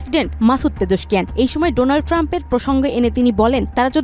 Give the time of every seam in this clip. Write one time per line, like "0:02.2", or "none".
none